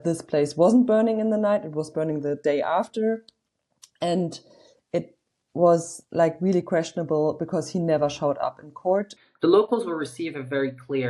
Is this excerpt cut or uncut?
cut